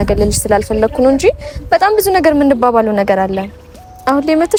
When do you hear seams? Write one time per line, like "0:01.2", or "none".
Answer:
none